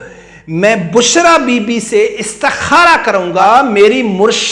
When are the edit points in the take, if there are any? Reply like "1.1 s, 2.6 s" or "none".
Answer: 3.4 s